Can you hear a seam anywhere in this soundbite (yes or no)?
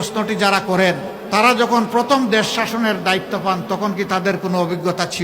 yes